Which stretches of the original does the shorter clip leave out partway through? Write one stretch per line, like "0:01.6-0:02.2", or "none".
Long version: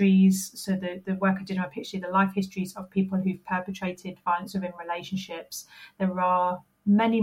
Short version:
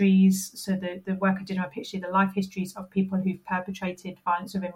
none